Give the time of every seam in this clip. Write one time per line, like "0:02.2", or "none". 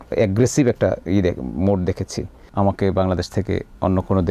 0:02.4